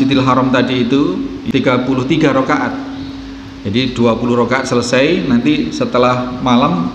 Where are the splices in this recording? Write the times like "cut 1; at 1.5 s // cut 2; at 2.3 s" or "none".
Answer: cut 1; at 1.4 s